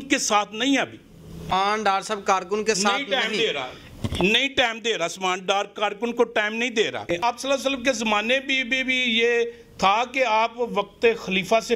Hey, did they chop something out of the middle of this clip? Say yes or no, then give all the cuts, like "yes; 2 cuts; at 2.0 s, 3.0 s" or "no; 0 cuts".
yes; 2 cuts; at 1.5 s, 7.2 s